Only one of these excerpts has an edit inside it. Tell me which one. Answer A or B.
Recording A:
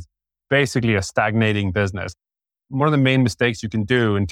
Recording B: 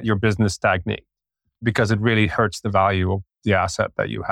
B